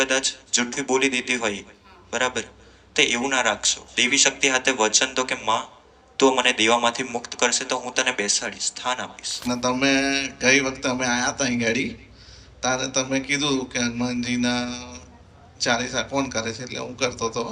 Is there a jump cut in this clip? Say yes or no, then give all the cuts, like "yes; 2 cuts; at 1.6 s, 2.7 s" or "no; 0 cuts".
yes; 1 cut; at 9.5 s